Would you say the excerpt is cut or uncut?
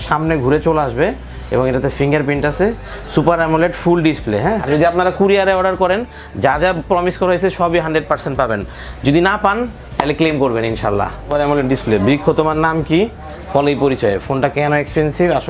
cut